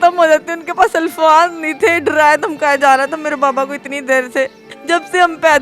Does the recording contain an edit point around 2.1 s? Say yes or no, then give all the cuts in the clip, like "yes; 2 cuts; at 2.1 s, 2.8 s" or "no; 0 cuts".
no; 1 cut; at 4.7 s